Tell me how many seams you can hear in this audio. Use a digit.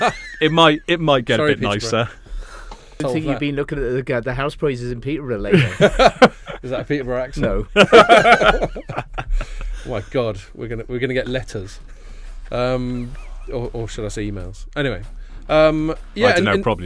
1